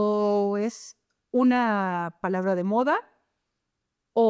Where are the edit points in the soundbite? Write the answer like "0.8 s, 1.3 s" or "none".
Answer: none